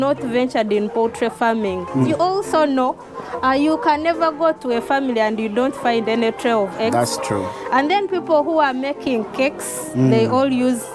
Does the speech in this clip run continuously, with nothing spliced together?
no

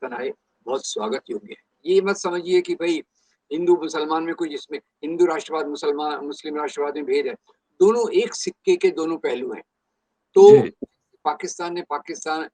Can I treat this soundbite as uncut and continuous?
no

